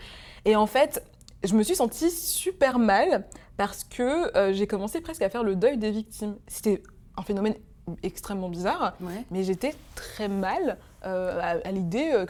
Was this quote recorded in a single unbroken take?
yes; 0 cuts

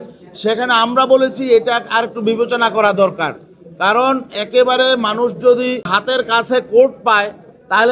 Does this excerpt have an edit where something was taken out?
yes; 1 cut; at 5.9 s

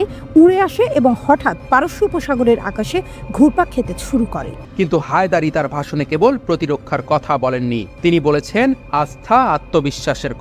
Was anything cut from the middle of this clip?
yes; 1 cut; at 4.6 s

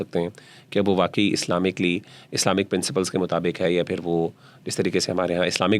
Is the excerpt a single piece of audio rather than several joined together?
yes; 0 cuts

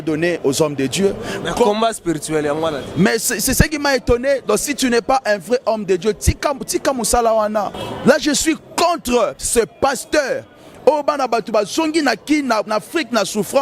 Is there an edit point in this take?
yes; 1 cut; at 7.8 s

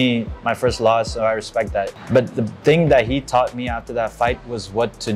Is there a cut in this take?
yes; 1 cut; at 2.0 s

